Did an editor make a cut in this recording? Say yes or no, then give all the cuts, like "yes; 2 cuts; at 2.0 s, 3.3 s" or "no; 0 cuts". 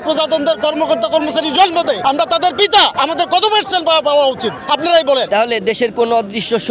yes; 1 cut; at 5.3 s